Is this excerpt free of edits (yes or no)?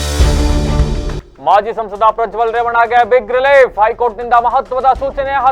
yes